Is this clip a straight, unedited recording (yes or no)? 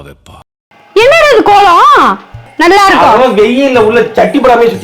no